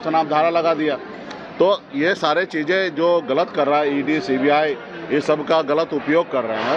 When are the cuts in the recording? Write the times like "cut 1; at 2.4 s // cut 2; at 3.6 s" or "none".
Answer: none